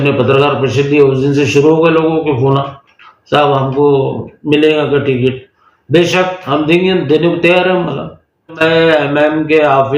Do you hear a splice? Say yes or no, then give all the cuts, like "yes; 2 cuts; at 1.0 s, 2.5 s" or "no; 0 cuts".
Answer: yes; 1 cut; at 8.6 s